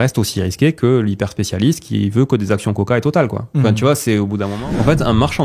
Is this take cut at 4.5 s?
yes; 1 cut; at 4.5 s

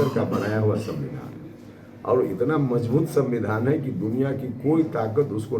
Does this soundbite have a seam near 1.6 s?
no; 0 cuts

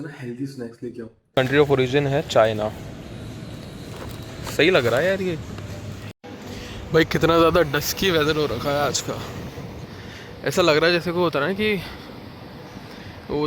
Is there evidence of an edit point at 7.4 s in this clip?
no; 2 cuts; at 1.3 s, 6.1 s

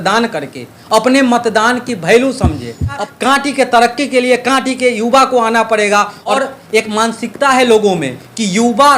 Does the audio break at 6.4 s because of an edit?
yes; 2 cuts; at 3.0 s, 6.4 s

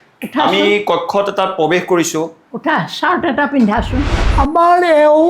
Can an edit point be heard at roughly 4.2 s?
yes; 1 cut; at 4.2 s

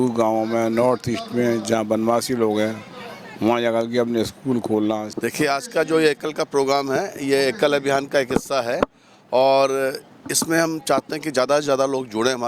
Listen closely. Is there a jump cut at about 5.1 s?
yes; 1 cut; at 5.1 s

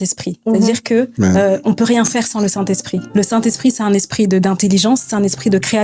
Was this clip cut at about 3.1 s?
yes; 2 cuts; at 1.1 s, 3.1 s

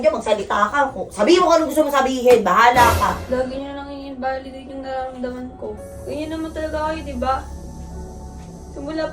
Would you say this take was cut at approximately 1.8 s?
no; 1 cut; at 5.9 s

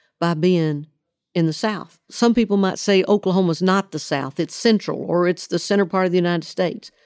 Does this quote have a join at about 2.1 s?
yes; 1 cut; at 2.1 s

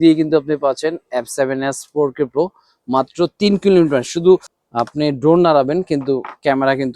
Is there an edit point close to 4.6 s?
yes; 1 cut; at 4.6 s

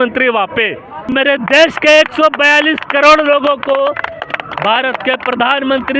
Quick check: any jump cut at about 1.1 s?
yes; 1 cut; at 1.1 s

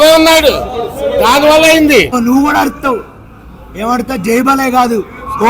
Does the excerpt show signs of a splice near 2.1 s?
yes; 1 cut; at 2.1 s

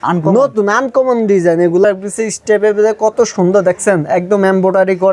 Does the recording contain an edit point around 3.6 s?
no; 1 cut; at 1.8 s

